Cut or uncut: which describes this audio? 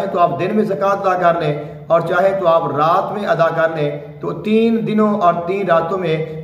uncut